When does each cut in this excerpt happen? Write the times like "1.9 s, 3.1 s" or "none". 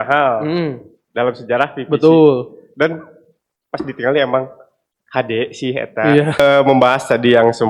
6.4 s